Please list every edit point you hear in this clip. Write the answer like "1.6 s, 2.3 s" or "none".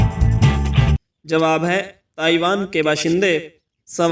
1.1 s